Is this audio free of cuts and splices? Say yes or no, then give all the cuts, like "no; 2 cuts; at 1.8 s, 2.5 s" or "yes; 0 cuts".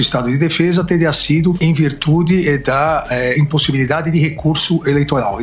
yes; 0 cuts